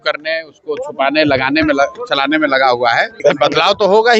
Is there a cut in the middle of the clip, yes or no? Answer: yes